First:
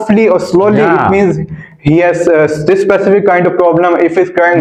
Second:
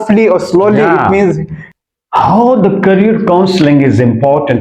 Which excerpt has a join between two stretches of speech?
second; 1 cut; at 1.7 s

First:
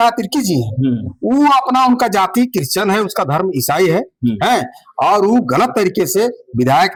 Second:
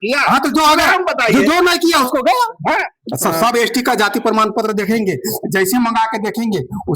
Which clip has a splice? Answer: second; 1 cut; at 2.9 s

